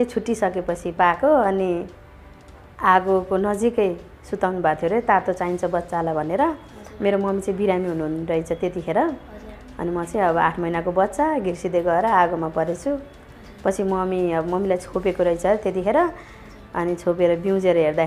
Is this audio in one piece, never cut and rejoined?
yes; 0 cuts

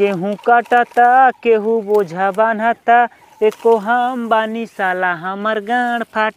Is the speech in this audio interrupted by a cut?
no; 0 cuts

